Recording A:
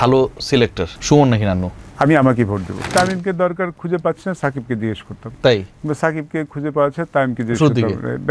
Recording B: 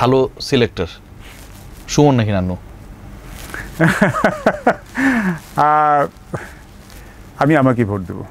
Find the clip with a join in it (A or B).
A